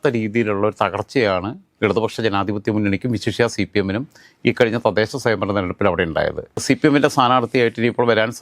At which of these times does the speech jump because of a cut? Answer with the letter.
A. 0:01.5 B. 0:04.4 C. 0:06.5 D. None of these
C